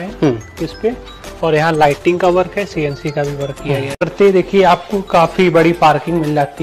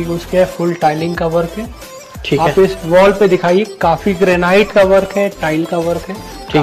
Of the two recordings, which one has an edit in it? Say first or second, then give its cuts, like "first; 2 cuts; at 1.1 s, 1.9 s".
first; 1 cut; at 4.1 s